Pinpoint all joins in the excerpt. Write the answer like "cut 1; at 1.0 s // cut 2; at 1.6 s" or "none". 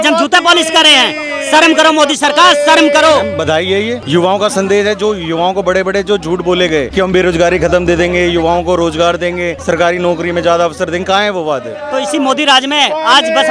cut 1; at 3.5 s // cut 2; at 6.9 s // cut 3; at 9.5 s // cut 4; at 11.8 s

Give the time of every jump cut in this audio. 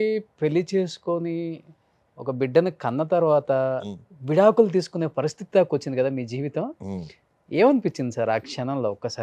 none

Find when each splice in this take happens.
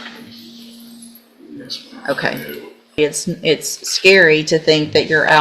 cut 1; at 3.0 s

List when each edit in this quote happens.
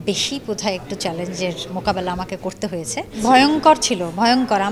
cut 1; at 3.1 s

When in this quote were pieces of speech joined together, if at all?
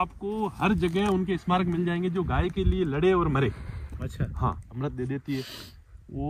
cut 1; at 4.7 s

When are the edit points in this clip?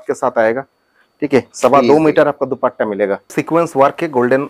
cut 1; at 3.3 s

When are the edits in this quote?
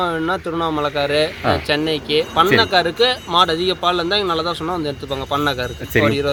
none

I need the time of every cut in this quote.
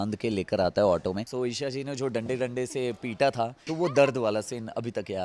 cut 1; at 1.3 s // cut 2; at 3.6 s

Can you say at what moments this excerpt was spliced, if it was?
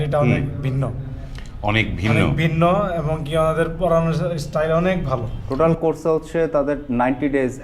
cut 1; at 5.4 s

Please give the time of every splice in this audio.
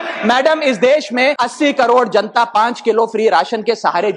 cut 1; at 1.5 s

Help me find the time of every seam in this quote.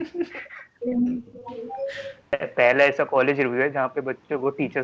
cut 1; at 2.3 s

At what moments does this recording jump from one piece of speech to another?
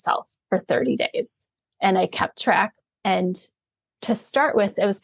cut 1; at 2.8 s

